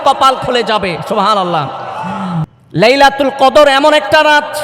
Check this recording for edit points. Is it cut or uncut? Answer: cut